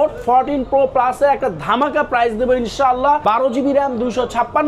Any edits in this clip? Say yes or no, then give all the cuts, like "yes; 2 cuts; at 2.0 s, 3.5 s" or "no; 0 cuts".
yes; 1 cut; at 3.2 s